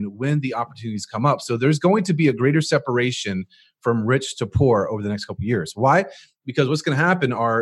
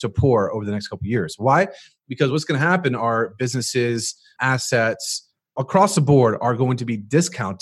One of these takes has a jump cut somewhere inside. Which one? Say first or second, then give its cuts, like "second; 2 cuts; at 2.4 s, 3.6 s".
second; 2 cuts; at 4.3 s, 5.6 s